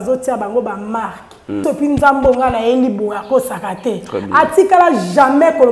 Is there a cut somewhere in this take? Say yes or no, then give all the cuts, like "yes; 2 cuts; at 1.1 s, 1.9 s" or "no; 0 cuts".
yes; 1 cut; at 1.6 s